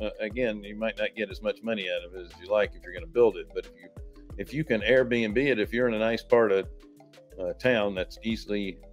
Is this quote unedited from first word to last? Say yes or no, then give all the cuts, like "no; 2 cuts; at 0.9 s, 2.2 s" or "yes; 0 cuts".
yes; 0 cuts